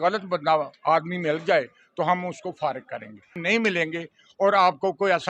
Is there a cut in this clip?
yes; 1 cut; at 3.4 s

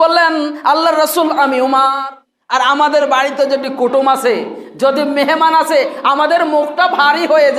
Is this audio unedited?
no; 1 cut; at 2.0 s

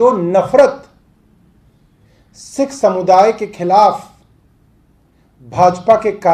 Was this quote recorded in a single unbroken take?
yes; 0 cuts

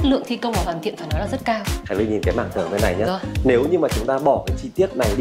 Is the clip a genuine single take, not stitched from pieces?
no; 1 cut; at 1.7 s

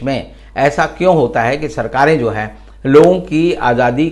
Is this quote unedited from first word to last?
yes; 0 cuts

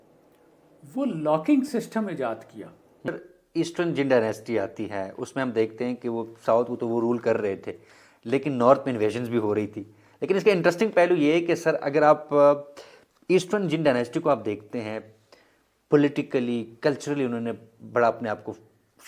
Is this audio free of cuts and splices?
no; 1 cut; at 3.1 s

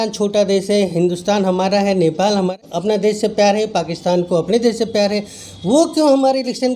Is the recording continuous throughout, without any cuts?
yes; 0 cuts

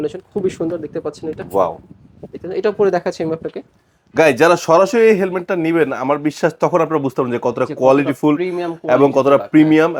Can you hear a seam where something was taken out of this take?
no; 0 cuts

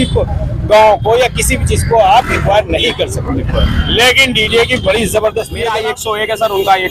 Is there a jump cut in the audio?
yes; 1 cut; at 5.8 s

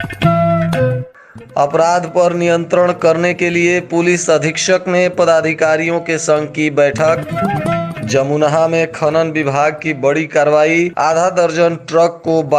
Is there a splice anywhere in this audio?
yes; 1 cut; at 1.2 s

